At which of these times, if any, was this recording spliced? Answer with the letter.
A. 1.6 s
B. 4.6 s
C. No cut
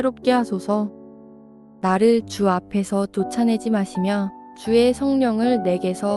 A